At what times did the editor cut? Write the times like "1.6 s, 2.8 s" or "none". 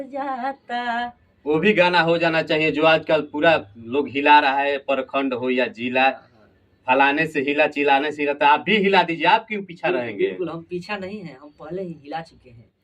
1.3 s